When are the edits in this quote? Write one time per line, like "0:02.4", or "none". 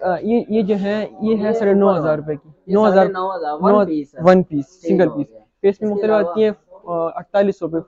none